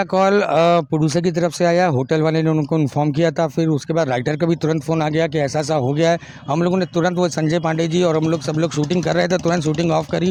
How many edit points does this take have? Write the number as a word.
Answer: zero